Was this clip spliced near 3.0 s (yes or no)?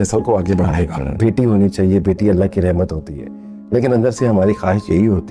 no